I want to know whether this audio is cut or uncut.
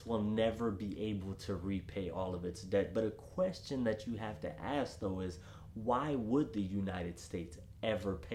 uncut